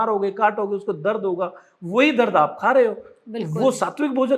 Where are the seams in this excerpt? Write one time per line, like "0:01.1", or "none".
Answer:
none